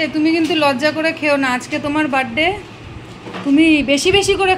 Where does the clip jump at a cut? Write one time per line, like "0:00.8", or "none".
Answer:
none